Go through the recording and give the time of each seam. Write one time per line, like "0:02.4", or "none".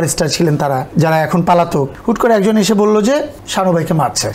0:00.9
0:01.9
0:03.4